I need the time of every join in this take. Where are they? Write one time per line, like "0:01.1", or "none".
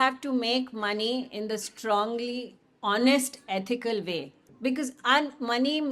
0:04.4